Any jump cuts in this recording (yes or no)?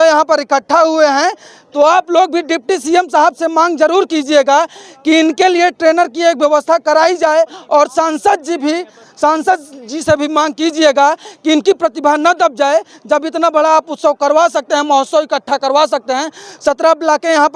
no